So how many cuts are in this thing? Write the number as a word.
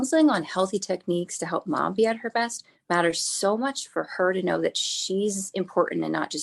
zero